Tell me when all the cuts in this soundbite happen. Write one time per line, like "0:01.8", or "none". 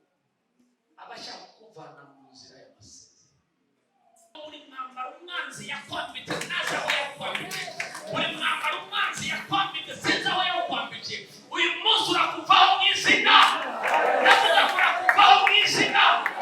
0:04.4